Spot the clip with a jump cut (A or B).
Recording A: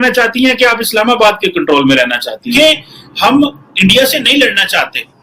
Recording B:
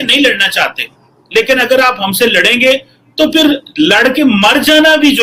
A